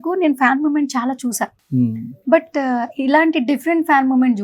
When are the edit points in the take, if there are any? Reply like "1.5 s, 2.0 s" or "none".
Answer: none